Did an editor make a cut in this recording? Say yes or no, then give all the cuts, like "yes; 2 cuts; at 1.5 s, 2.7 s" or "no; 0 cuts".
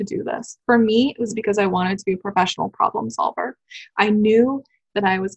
no; 0 cuts